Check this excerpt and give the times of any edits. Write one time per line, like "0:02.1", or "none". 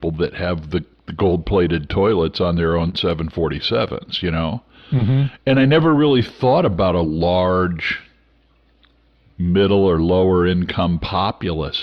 none